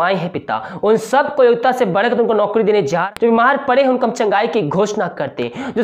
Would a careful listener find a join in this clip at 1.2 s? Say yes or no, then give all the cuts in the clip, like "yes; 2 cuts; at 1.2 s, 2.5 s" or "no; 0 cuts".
no; 1 cut; at 3.1 s